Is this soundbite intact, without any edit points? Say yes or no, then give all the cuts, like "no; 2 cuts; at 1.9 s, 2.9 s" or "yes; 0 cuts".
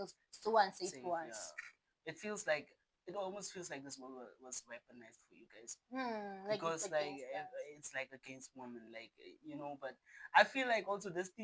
yes; 0 cuts